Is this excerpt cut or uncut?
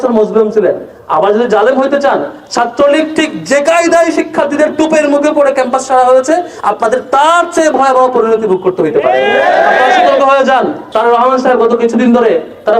cut